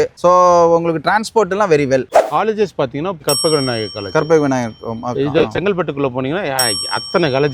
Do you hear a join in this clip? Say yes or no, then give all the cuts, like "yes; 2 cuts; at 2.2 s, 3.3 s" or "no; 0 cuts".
yes; 1 cut; at 2.1 s